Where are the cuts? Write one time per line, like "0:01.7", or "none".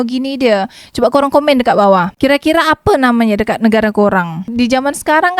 0:04.5